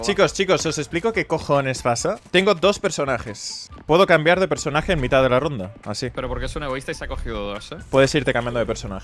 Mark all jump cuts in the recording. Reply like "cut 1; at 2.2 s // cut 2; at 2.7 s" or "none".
cut 1; at 2.2 s // cut 2; at 7.8 s